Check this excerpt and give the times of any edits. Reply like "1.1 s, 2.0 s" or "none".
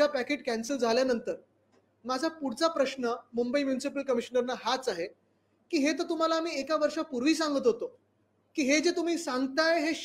none